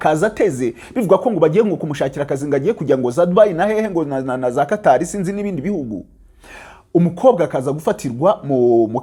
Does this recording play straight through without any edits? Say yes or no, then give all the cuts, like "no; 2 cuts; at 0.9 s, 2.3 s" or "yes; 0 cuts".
yes; 0 cuts